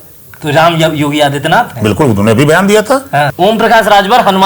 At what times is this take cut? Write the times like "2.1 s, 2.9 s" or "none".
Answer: 3.3 s